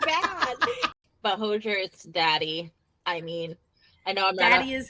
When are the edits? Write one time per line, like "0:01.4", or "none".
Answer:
0:01.0